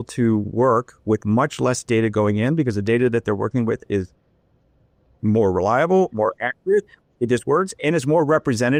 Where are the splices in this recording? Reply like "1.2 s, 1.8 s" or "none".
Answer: none